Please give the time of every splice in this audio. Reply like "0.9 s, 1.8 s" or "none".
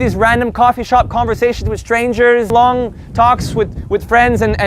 2.5 s

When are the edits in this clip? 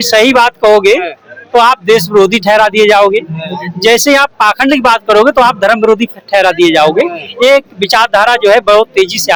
none

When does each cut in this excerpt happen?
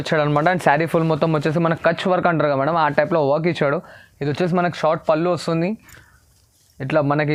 none

